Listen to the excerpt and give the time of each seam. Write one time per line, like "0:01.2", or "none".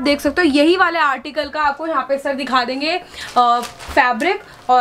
none